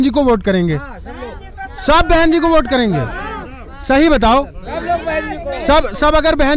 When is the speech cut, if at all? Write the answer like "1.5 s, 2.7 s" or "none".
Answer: none

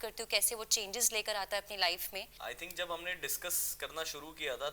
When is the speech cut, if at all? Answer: 2.3 s

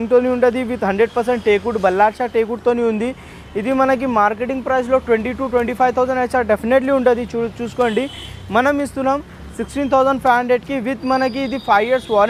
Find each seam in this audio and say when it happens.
none

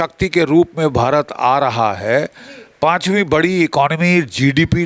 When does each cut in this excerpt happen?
none

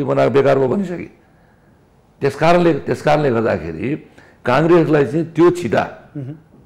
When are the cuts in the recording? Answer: none

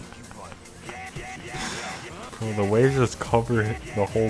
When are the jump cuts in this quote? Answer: 2.3 s

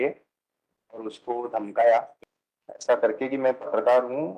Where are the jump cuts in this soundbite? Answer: 2.1 s

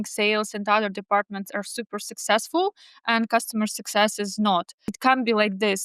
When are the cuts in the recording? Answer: 5.0 s

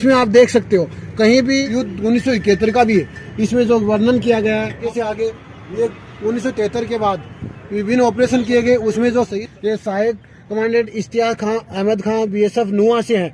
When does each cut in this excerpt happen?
1.6 s, 4.8 s, 9.4 s

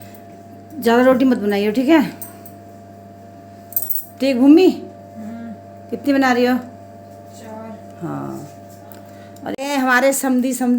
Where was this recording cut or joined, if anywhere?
9.5 s

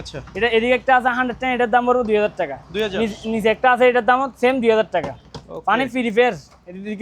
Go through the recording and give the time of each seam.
none

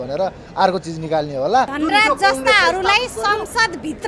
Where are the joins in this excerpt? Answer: 1.7 s

